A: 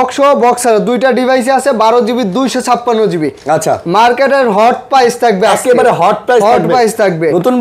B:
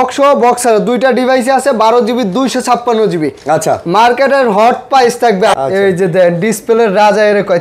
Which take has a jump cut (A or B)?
B